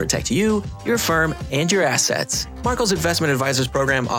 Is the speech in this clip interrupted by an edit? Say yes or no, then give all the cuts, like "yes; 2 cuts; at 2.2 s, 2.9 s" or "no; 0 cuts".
no; 0 cuts